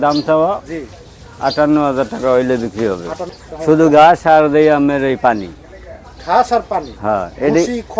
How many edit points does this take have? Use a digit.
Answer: 1